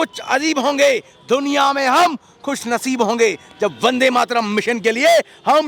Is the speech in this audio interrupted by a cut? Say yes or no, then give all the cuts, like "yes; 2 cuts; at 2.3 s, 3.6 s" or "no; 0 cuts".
no; 0 cuts